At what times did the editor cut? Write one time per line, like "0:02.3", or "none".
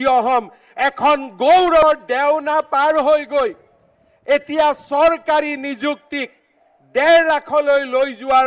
0:01.8

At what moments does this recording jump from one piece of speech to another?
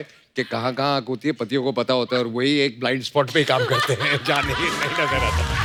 none

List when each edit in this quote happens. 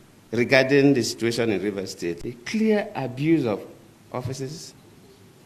0:02.2

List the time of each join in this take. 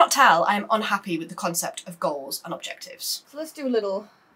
0:03.3

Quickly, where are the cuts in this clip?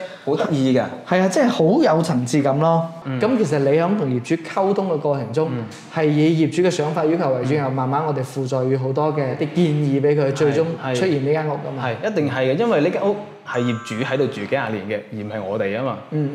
0:03.0
0:09.4
0:10.8

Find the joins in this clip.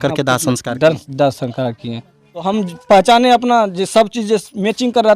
0:02.4

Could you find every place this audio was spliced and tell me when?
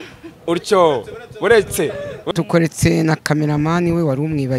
0:02.3

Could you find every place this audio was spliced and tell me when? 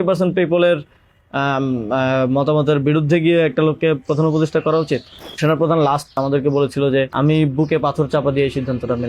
0:05.4
0:06.2
0:07.1

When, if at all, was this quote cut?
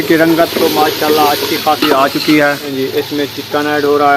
0:02.7

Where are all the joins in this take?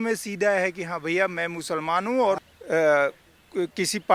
0:02.5

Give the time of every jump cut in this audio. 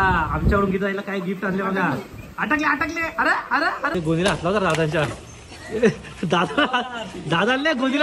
0:03.9

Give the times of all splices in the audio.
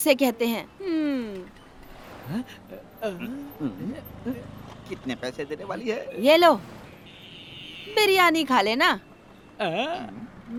none

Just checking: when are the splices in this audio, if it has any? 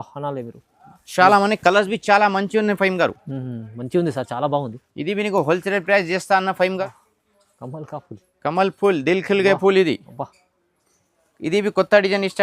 0:06.8

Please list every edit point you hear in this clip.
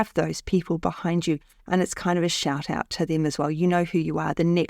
0:01.5

